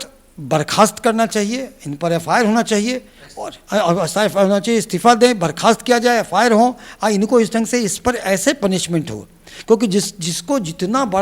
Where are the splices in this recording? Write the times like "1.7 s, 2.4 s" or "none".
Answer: none